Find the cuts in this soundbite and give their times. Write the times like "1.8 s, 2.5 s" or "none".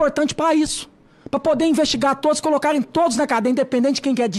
none